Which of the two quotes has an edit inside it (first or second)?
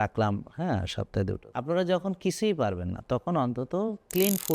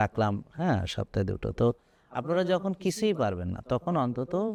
first